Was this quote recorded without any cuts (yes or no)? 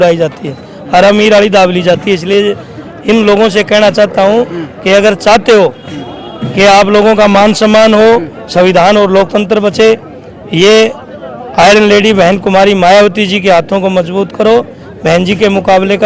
yes